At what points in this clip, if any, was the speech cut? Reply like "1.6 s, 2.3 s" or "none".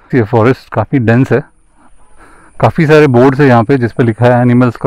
none